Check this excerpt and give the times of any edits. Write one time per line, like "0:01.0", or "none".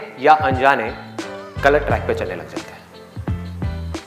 0:02.4